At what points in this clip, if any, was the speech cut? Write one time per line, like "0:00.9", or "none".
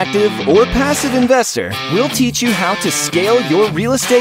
none